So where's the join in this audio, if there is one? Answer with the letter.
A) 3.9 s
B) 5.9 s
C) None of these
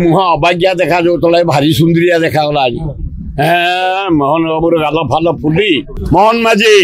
B